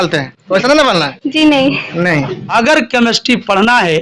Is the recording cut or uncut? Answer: cut